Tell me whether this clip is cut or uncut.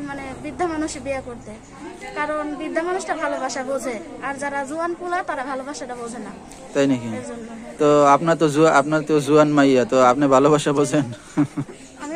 uncut